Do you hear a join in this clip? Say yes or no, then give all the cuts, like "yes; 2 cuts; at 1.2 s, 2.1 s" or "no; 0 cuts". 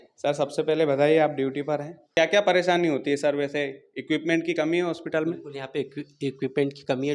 yes; 1 cut; at 2.1 s